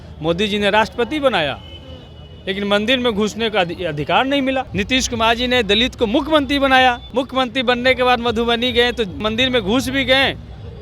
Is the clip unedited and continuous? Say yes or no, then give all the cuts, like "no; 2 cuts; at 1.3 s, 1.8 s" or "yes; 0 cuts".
no; 3 cuts; at 4.7 s, 7.0 s, 9.2 s